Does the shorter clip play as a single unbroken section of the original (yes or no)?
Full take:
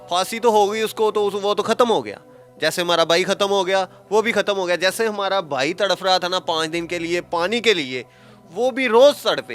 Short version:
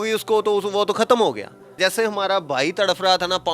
no